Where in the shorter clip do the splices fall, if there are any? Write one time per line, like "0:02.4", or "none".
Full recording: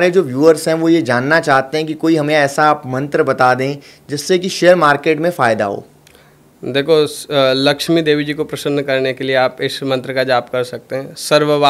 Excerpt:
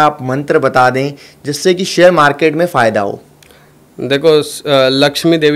none